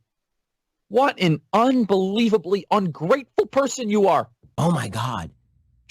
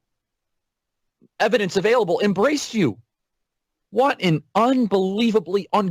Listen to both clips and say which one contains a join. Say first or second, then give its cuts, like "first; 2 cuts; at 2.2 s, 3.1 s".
first; 1 cut; at 4.5 s